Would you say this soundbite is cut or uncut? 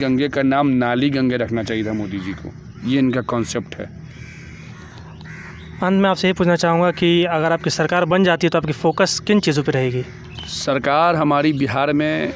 uncut